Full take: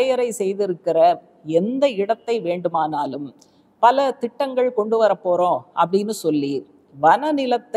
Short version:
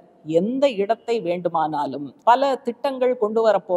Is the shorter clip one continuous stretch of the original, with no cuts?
no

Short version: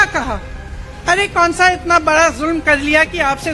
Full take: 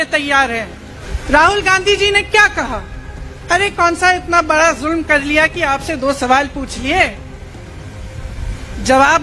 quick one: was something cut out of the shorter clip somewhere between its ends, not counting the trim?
no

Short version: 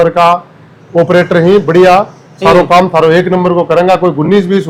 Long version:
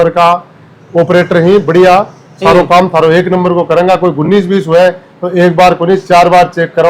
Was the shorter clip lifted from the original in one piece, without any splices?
yes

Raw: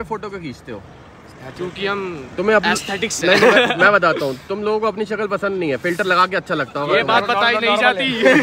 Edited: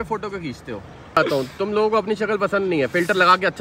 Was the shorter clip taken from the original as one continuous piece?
no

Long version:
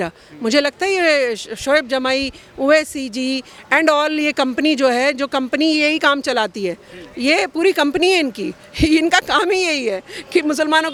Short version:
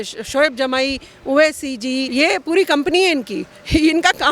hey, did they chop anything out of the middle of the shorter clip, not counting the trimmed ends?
yes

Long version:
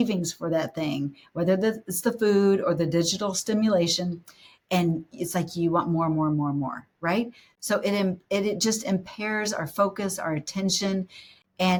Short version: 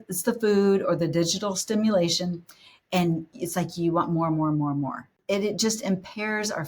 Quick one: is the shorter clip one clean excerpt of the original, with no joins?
no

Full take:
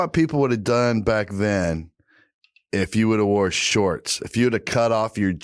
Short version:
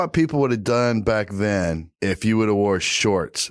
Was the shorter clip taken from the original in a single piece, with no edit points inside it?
no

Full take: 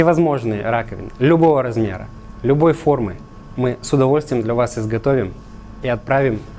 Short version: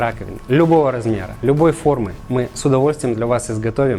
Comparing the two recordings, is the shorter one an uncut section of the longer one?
no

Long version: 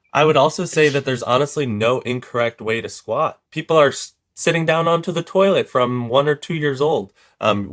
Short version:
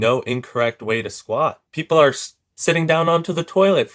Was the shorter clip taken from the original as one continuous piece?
yes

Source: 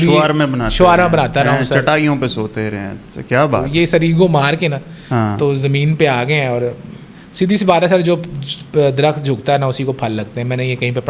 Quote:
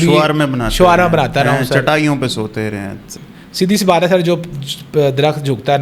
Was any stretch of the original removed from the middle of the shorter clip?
yes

